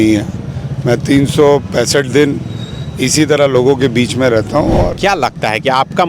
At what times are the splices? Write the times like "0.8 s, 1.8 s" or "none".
4.9 s